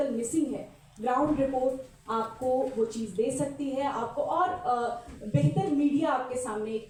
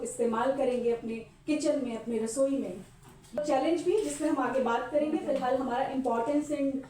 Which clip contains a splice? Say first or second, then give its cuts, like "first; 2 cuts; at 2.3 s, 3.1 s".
second; 1 cut; at 3.4 s